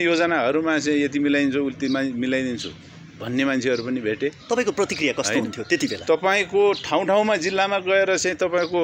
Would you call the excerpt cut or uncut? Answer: uncut